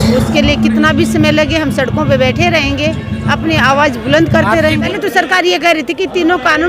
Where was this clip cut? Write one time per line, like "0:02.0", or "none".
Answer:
0:04.9